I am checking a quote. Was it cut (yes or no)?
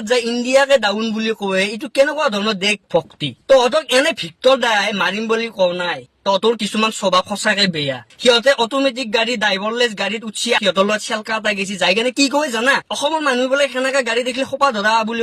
yes